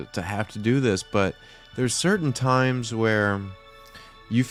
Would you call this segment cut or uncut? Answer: uncut